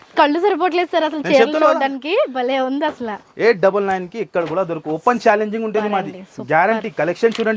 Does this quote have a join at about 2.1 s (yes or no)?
no